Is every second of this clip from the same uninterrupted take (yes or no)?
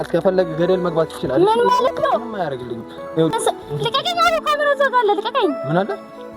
no